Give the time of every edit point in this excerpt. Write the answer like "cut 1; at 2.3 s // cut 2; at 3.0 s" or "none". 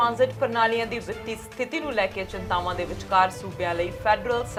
none